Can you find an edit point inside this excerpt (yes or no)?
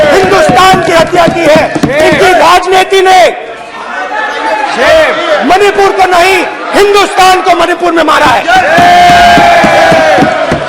no